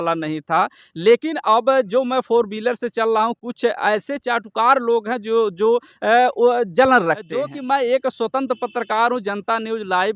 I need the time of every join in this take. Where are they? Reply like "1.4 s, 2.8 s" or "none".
7.6 s